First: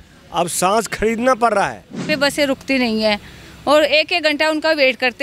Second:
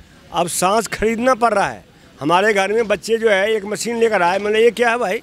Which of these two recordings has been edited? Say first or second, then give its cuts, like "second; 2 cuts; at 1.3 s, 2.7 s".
first; 1 cut; at 2.1 s